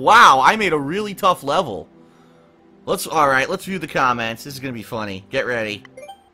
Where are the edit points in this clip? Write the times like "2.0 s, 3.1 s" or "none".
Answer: none